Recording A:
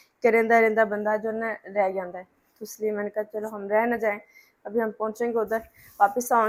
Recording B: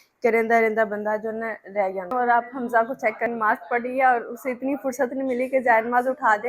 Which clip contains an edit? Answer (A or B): B